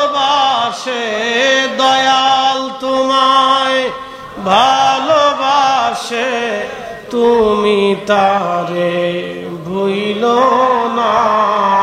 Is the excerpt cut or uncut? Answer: uncut